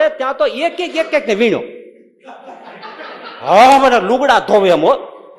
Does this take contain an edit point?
no; 0 cuts

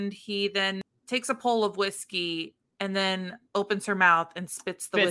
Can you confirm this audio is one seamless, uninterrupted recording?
no; 1 cut; at 0.9 s

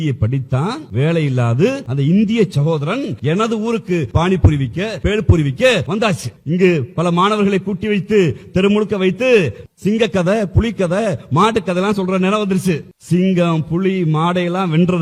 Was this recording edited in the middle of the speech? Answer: yes; 6 cuts; at 0.8 s, 1.9 s, 3.1 s, 4.1 s, 5.0 s, 6.0 s

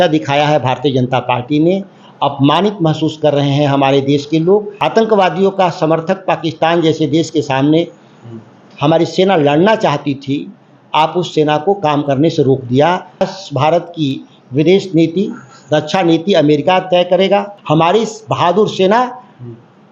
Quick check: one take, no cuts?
no; 3 cuts; at 4.7 s, 13.2 s, 17.5 s

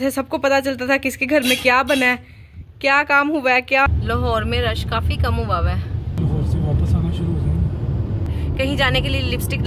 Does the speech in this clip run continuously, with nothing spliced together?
no; 2 cuts; at 3.9 s, 8.3 s

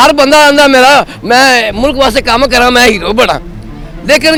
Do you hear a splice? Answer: no; 0 cuts

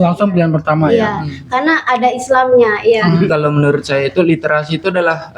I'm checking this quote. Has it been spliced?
yes; 1 cut; at 3.3 s

